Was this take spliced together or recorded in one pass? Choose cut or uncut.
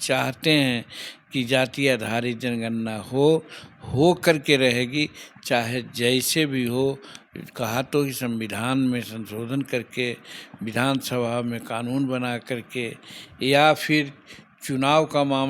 uncut